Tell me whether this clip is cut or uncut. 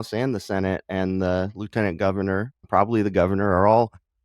cut